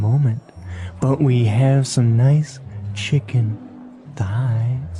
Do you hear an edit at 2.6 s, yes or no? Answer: no